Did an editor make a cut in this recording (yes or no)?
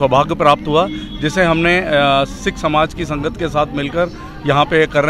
no